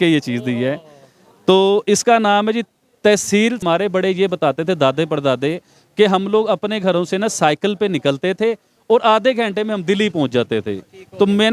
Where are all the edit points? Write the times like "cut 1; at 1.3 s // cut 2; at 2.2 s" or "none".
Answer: cut 1; at 3.6 s